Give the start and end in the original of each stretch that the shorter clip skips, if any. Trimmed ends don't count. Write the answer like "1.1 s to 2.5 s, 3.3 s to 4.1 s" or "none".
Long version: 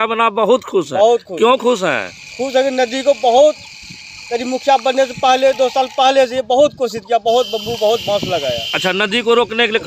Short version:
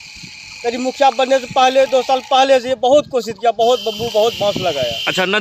none